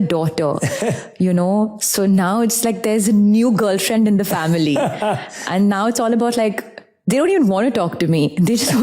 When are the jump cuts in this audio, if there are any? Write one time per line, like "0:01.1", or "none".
none